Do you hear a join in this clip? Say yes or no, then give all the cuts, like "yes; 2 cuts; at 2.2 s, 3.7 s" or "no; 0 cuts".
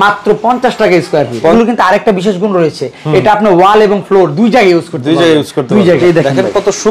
yes; 2 cuts; at 1.5 s, 6.0 s